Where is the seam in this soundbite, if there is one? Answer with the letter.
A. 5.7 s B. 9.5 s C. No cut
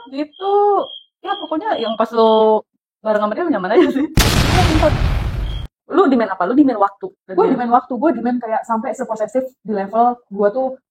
A